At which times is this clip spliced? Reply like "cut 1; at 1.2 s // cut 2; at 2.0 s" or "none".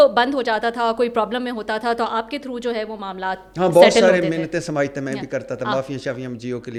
none